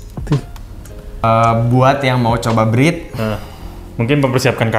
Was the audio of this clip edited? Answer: yes; 1 cut; at 1.2 s

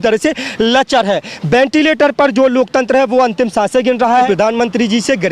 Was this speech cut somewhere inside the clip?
yes; 1 cut; at 4.3 s

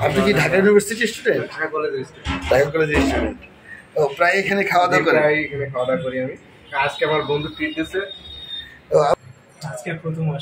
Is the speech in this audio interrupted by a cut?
yes; 1 cut; at 9.1 s

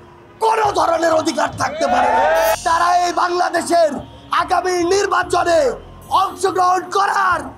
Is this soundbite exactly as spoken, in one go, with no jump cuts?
no; 1 cut; at 2.5 s

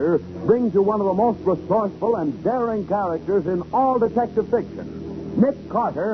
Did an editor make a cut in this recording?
no; 0 cuts

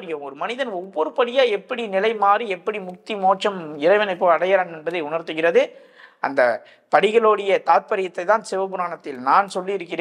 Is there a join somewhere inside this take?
no; 0 cuts

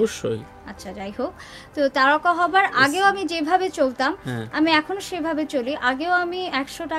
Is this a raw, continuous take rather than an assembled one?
yes; 0 cuts

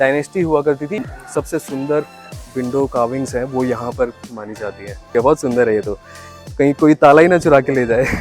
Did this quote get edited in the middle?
yes; 2 cuts; at 1.1 s, 5.0 s

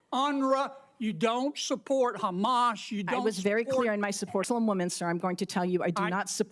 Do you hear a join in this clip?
yes; 1 cut; at 4.4 s

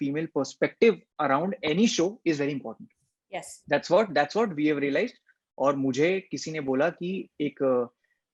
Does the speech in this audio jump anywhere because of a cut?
no; 0 cuts

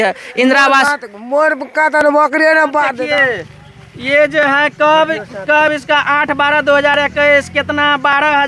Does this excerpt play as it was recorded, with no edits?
no; 1 cut; at 3.0 s

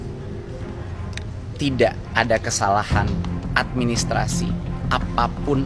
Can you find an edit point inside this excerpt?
no; 0 cuts

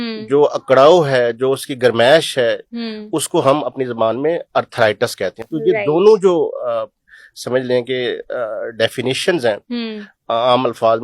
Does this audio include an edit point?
no; 0 cuts

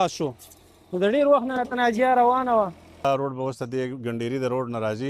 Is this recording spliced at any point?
yes; 1 cut; at 3.0 s

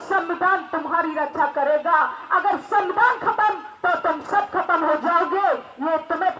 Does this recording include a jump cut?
no; 0 cuts

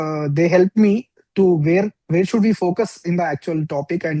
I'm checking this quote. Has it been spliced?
no; 0 cuts

